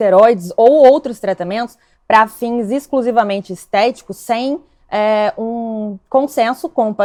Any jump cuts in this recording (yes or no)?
no